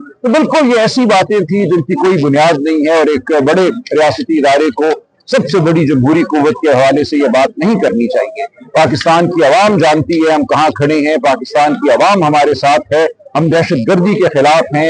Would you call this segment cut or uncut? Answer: uncut